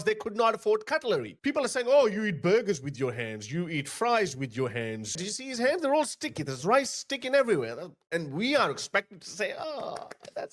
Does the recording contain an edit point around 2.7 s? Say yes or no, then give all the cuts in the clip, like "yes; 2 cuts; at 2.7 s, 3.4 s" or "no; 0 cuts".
no; 2 cuts; at 1.4 s, 5.2 s